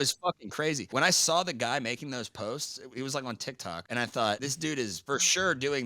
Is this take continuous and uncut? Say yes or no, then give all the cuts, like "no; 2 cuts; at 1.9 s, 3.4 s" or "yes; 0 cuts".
no; 3 cuts; at 0.8 s, 3.8 s, 4.5 s